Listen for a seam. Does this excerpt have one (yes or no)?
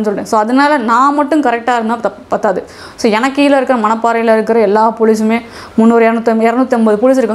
no